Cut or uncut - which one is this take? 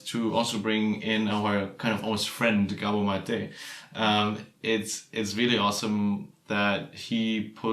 uncut